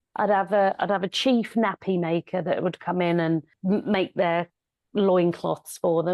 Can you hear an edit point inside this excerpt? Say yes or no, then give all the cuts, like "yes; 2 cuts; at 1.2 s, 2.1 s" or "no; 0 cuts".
yes; 1 cut; at 3.5 s